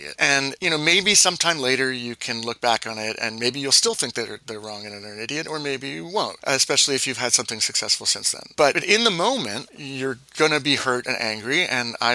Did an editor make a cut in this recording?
no; 0 cuts

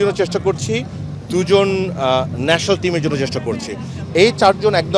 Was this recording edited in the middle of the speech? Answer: no; 0 cuts

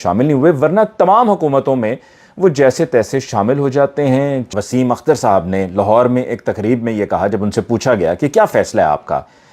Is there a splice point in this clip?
yes; 1 cut; at 4.4 s

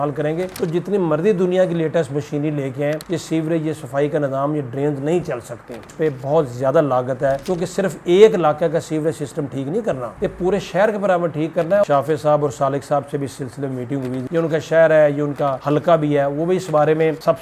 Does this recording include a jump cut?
yes; 3 cuts; at 5.8 s, 11.9 s, 14.2 s

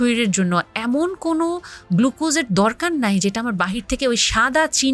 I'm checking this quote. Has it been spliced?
no; 0 cuts

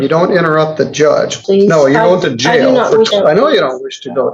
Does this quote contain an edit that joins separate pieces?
yes; 2 cuts; at 1.4 s, 3.1 s

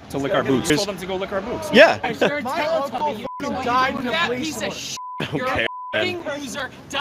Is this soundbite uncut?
no; 2 cuts; at 0.7 s, 2.1 s

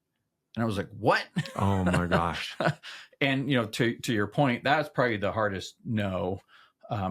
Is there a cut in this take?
no; 0 cuts

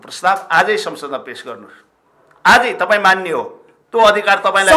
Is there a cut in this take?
no; 0 cuts

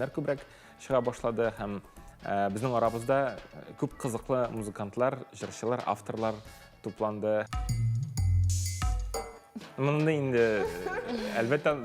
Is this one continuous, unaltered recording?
no; 1 cut; at 7.5 s

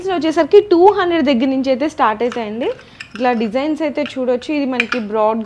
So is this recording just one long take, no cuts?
yes; 0 cuts

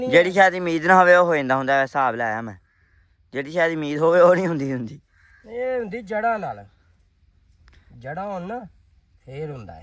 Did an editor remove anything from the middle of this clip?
no; 0 cuts

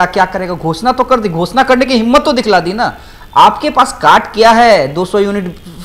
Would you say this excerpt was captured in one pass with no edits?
yes; 0 cuts

